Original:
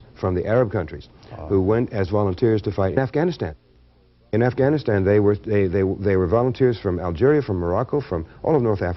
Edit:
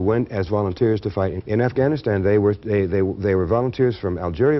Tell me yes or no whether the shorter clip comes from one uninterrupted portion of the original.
no